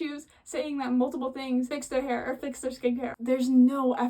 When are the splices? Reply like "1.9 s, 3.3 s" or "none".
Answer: 1.8 s, 3.1 s